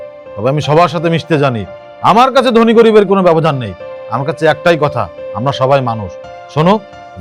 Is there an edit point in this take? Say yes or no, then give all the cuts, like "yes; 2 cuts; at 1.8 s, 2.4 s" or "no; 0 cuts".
no; 0 cuts